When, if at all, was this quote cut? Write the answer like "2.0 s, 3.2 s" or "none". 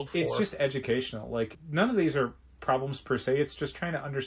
1.6 s